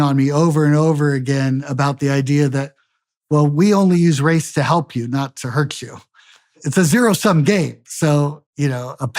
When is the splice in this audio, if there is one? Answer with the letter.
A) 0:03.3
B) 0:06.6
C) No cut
B